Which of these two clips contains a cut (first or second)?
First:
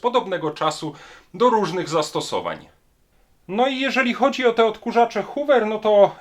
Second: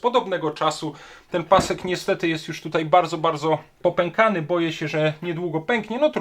second